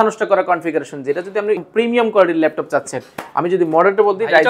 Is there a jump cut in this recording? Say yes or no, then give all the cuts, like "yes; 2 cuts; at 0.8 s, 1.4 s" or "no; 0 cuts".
yes; 1 cut; at 1.7 s